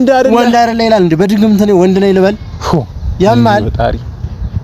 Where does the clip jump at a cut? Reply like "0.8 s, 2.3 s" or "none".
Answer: none